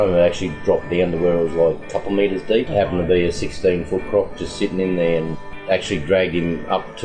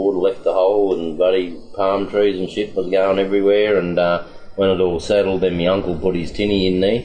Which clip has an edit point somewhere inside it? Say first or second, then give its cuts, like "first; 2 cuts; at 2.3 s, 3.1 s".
first; 2 cuts; at 2.7 s, 5.3 s